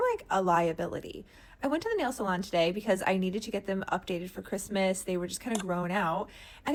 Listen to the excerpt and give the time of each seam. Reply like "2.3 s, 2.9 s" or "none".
none